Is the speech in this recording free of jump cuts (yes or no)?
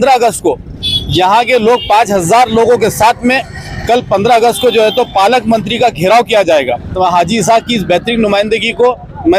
no